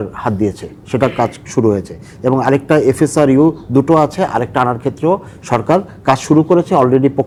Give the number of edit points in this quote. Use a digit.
0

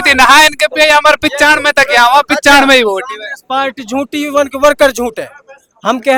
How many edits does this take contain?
0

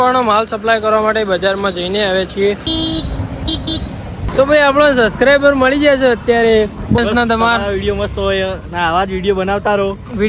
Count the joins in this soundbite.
3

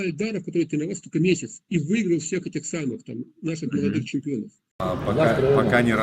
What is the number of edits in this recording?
1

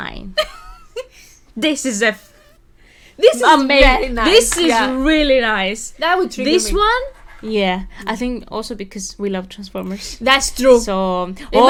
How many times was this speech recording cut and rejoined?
0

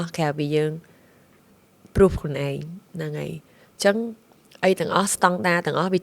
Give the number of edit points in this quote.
0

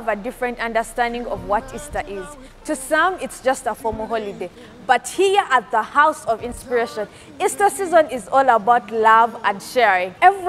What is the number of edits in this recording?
0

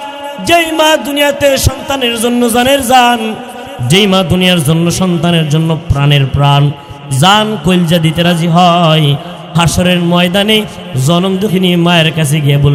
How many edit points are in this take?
0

